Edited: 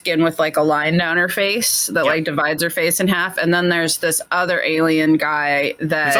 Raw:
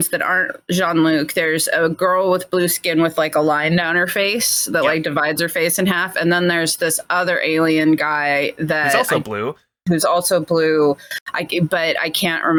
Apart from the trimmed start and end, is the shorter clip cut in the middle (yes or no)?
no